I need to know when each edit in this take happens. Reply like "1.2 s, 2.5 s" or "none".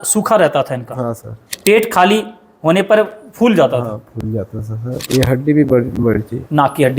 1.5 s, 5.0 s